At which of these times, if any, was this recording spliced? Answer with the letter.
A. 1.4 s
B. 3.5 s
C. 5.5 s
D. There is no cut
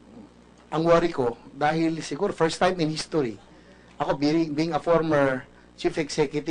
C